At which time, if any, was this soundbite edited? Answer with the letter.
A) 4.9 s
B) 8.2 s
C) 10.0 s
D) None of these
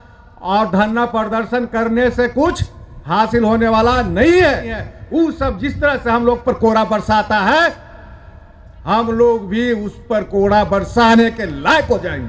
A